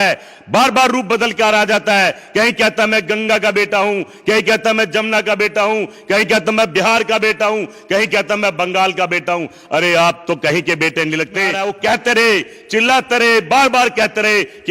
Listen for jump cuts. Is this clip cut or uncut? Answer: cut